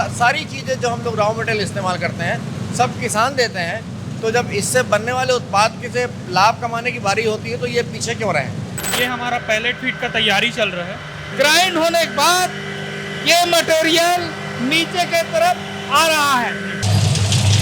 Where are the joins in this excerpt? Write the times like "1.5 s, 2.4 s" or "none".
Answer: 8.8 s, 11.1 s, 16.8 s